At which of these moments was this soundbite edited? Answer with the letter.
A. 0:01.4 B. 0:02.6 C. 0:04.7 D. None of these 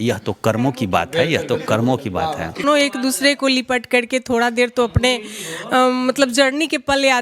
B